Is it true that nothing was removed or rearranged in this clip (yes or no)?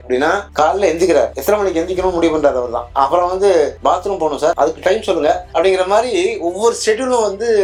yes